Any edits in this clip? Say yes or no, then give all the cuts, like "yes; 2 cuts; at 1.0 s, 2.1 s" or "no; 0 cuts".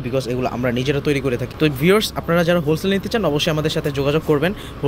no; 0 cuts